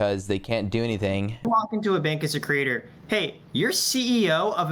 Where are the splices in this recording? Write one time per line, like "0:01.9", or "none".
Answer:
0:01.4